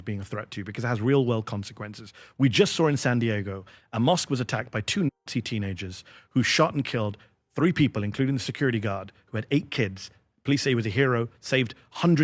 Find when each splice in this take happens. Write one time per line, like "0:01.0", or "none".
none